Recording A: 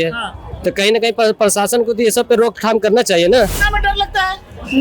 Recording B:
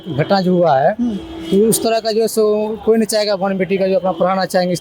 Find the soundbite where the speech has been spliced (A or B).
A